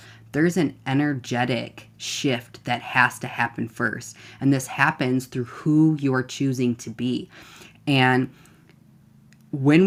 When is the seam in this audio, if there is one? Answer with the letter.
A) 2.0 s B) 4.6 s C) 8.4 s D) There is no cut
D